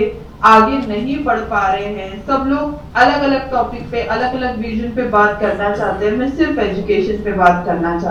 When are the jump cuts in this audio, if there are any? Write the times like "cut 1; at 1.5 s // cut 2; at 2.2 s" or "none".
none